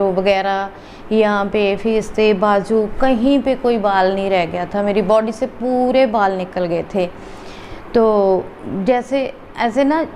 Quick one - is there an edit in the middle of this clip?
no; 0 cuts

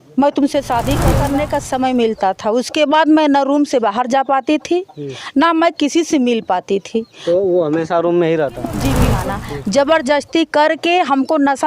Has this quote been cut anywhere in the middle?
yes; 2 cuts; at 1.1 s, 9.1 s

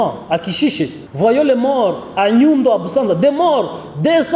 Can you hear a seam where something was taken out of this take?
yes; 1 cut; at 1.0 s

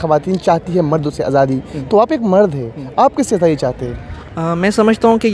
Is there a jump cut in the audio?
no; 0 cuts

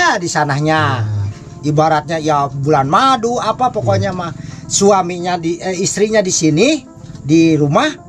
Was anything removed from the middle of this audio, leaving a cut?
no; 0 cuts

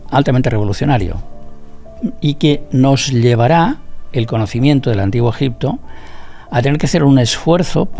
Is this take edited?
no; 0 cuts

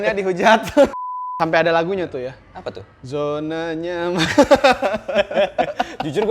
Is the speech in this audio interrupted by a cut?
yes; 1 cut; at 0.9 s

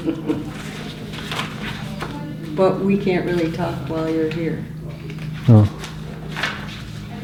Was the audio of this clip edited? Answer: no; 0 cuts

